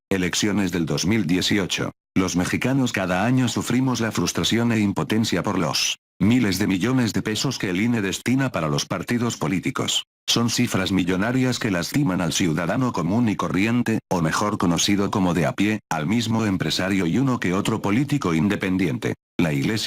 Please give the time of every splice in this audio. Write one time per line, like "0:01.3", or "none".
none